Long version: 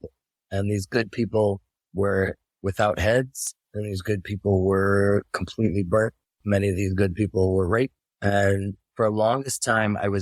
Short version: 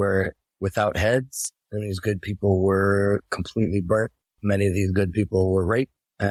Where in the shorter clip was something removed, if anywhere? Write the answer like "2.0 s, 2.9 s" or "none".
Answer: none